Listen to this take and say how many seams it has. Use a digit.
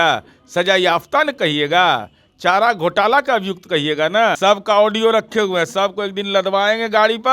1